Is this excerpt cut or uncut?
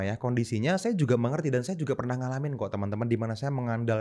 uncut